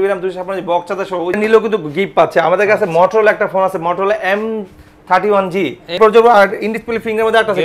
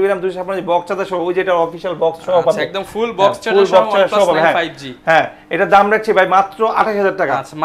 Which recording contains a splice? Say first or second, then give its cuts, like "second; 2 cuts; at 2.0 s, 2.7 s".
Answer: first; 2 cuts; at 1.3 s, 6.0 s